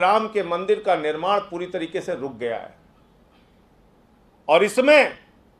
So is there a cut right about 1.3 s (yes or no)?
no